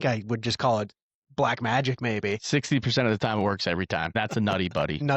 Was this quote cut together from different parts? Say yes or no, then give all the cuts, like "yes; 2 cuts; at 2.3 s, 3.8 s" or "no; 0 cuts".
yes; 1 cut; at 4.2 s